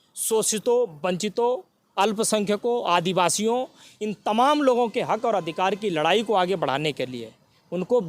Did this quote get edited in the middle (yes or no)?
no